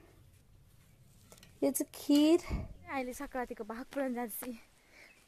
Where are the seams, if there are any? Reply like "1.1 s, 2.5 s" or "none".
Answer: 2.9 s